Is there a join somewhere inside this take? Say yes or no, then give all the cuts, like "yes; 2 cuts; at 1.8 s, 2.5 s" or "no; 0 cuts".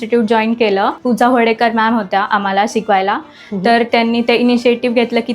yes; 1 cut; at 1.0 s